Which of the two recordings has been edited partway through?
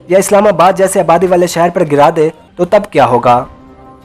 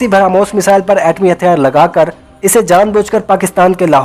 first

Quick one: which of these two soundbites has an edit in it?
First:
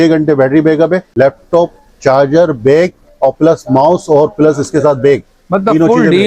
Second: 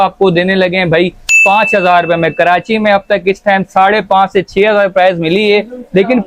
first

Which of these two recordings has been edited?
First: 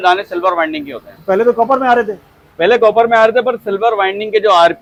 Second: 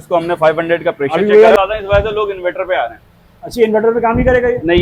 second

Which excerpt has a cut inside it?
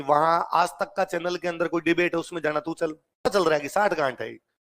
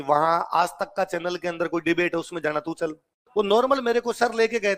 first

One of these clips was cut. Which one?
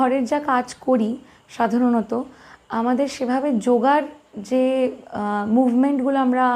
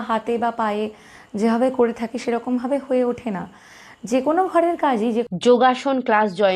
second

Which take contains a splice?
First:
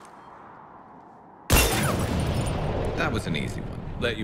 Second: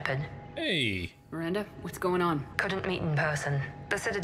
second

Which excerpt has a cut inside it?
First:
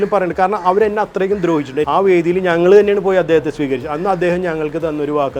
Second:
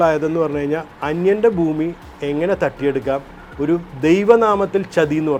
first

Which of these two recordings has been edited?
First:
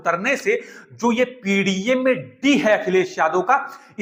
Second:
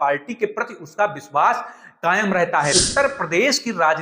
second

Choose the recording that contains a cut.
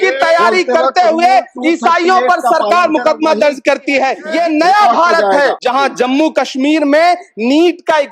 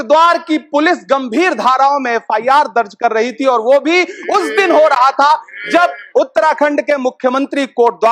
first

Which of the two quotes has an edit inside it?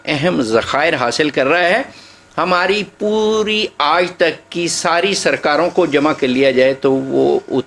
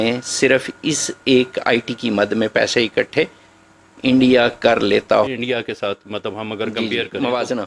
second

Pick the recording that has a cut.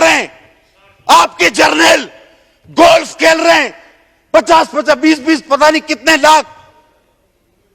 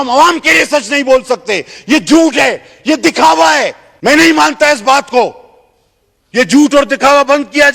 second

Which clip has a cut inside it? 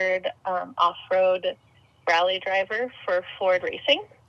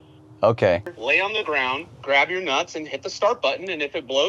second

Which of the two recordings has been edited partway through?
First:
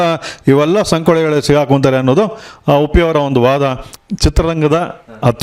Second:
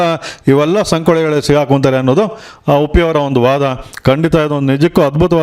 first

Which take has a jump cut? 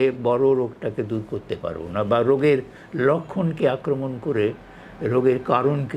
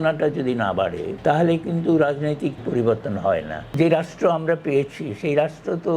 second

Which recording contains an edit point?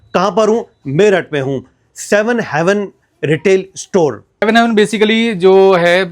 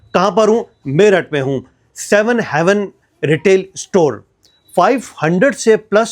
first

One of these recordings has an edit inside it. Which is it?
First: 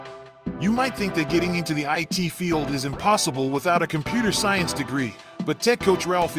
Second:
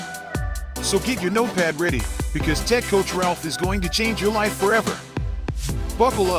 first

